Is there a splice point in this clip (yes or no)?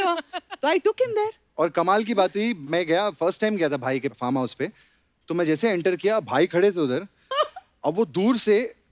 no